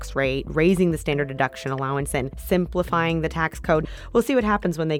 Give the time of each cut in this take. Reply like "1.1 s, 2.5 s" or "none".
2.4 s, 3.8 s